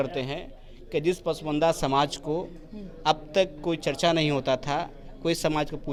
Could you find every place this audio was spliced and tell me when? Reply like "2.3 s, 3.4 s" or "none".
none